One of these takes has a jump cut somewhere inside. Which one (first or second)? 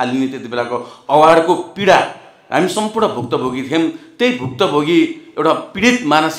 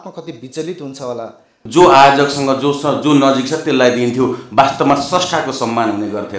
second